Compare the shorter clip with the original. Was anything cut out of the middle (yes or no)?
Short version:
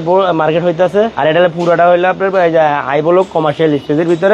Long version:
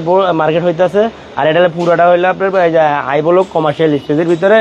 yes